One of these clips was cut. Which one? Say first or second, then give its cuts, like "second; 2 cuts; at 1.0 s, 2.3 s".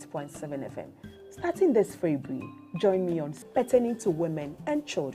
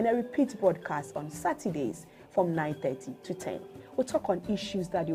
first; 1 cut; at 3.3 s